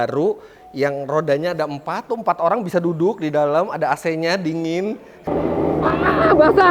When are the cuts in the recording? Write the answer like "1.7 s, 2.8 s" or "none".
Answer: 5.3 s

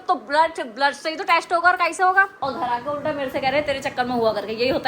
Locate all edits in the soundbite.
2.3 s

